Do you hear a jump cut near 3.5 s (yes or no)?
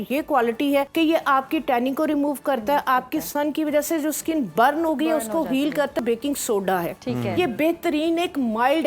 no